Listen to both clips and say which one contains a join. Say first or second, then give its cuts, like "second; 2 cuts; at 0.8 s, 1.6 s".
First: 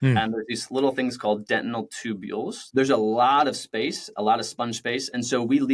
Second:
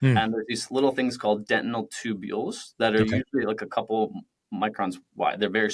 first; 1 cut; at 2.6 s